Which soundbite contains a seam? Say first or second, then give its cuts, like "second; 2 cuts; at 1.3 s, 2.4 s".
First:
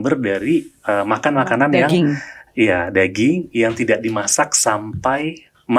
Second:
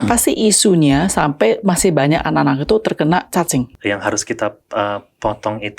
second; 1 cut; at 3.7 s